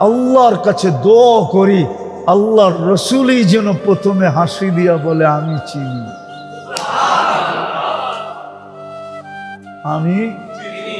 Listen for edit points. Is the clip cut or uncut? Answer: cut